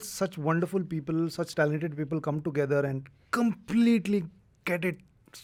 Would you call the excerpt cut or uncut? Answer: uncut